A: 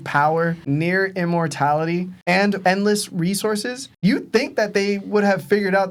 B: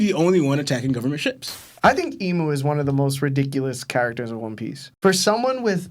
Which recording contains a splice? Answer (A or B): B